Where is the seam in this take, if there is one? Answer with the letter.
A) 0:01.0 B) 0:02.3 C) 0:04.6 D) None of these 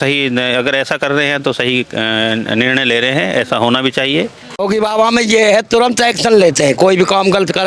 C